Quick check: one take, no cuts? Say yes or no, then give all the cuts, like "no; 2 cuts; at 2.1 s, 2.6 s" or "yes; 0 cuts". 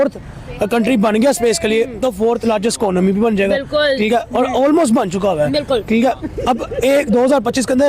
yes; 0 cuts